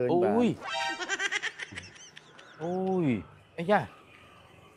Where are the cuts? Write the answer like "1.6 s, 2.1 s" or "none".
none